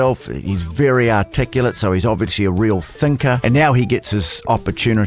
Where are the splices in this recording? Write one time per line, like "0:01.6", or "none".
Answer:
0:03.4